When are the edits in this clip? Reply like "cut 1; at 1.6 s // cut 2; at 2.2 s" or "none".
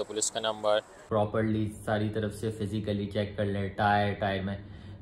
none